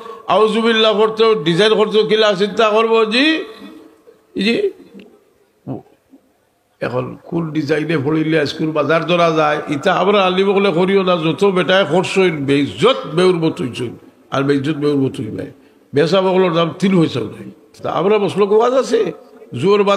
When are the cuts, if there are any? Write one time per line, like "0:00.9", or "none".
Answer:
0:17.8